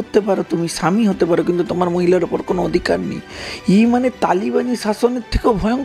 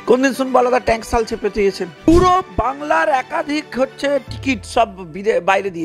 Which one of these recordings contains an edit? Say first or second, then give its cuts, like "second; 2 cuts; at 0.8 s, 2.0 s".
second; 1 cut; at 2.1 s